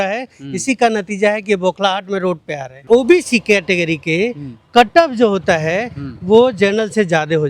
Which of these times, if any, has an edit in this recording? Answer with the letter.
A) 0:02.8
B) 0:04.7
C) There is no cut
A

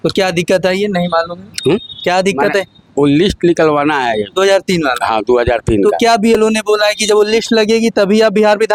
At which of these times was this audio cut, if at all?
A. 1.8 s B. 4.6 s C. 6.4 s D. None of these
D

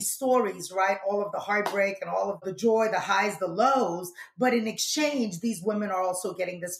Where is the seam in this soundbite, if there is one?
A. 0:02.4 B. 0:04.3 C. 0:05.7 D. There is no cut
A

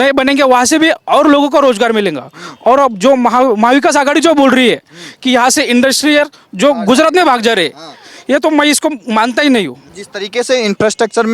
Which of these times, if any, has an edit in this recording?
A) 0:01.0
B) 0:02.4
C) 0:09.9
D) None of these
C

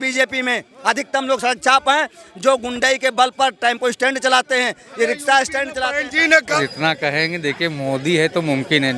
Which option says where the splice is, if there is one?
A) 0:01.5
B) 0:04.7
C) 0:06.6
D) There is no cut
C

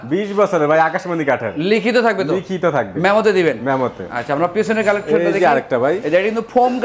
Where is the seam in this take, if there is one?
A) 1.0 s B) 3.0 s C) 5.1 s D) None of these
D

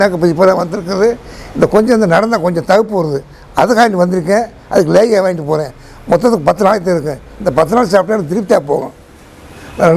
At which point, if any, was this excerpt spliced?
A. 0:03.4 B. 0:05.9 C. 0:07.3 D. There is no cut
D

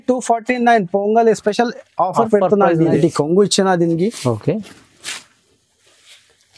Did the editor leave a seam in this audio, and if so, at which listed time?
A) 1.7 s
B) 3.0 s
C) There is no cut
B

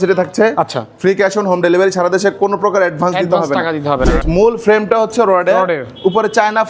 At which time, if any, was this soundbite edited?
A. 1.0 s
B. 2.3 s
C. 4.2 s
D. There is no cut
C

